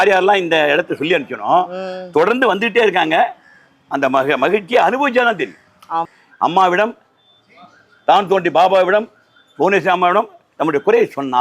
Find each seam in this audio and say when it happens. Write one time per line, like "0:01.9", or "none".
0:06.2